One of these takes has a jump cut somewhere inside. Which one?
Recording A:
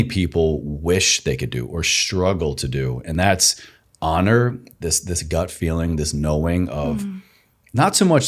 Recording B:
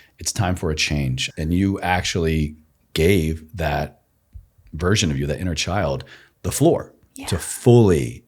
B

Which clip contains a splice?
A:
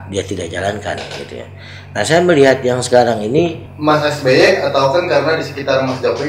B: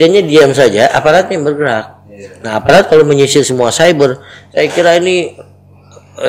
A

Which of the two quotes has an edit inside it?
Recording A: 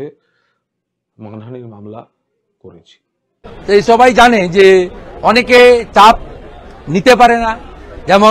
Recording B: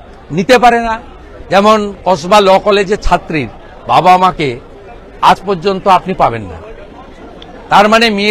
A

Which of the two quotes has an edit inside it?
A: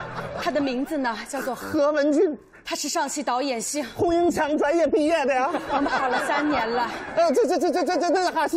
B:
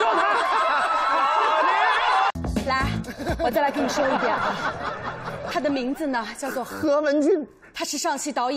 B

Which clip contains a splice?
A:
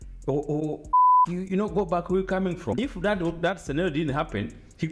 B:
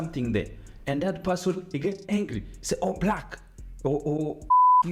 A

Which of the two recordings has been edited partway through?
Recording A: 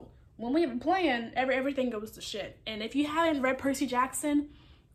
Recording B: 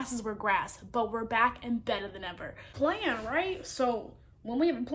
B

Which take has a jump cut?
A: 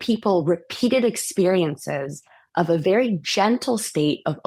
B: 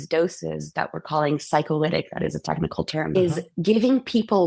B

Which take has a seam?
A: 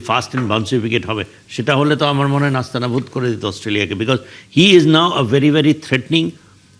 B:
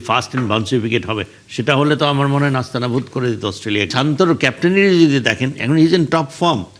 B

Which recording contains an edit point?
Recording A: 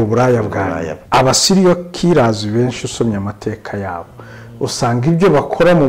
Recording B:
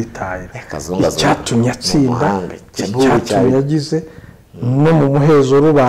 A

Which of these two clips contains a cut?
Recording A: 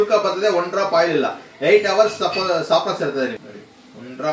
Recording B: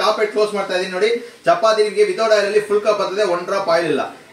A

